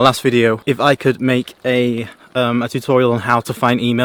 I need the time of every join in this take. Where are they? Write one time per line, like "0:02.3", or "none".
none